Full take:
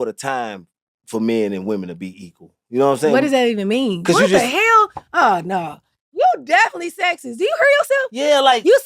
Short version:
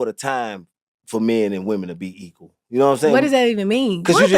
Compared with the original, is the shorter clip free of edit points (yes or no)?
yes